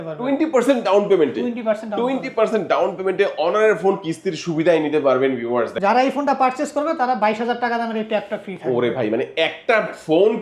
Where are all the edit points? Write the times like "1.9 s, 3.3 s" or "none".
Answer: 5.7 s